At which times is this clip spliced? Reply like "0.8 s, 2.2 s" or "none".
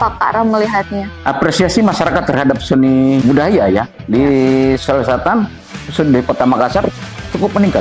1.1 s, 3.2 s